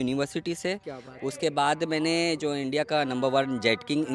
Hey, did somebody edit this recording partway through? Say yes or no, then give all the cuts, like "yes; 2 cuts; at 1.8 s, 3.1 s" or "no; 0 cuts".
no; 0 cuts